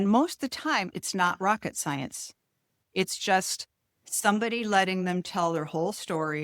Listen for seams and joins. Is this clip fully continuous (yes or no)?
no